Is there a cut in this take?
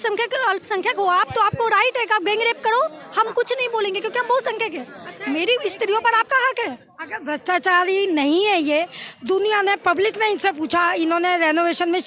no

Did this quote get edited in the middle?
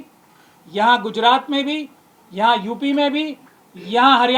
no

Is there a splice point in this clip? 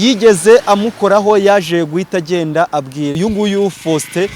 yes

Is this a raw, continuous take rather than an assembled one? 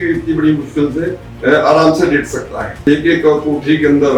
no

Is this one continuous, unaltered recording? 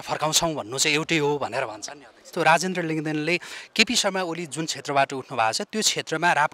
no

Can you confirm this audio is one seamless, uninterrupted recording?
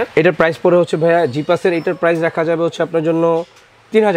yes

